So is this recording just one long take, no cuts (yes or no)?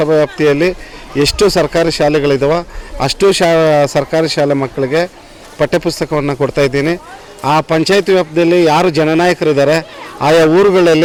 yes